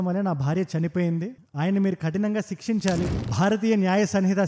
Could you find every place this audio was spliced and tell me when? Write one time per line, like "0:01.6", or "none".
0:03.1

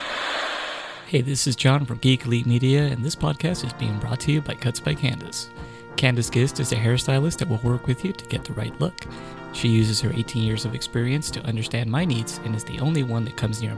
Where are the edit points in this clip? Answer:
0:00.9

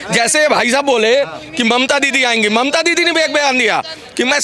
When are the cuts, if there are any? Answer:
none

